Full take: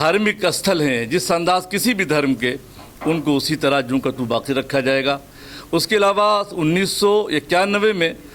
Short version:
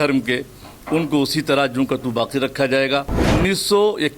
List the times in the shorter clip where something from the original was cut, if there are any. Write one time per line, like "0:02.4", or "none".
0:03.3